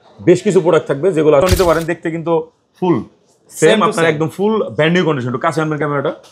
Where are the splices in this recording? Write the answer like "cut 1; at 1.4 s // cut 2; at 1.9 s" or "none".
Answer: cut 1; at 1.4 s